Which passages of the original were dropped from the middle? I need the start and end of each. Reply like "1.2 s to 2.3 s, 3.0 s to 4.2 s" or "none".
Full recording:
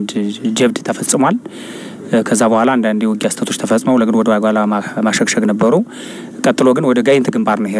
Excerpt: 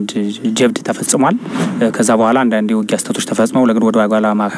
1.6 s to 1.9 s